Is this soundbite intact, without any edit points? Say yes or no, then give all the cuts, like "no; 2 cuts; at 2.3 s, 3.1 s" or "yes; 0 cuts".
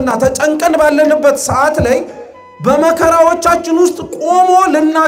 yes; 0 cuts